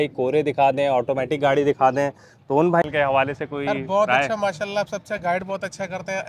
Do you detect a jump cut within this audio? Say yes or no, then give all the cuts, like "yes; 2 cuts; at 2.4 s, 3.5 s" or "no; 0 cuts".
yes; 1 cut; at 2.8 s